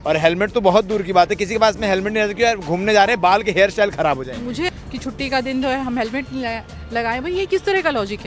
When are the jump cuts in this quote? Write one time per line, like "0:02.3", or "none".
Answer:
0:04.7